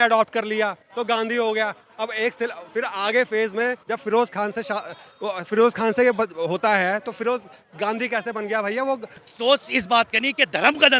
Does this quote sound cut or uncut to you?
cut